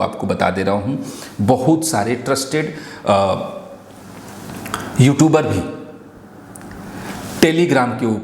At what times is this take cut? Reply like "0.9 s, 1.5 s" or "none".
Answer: none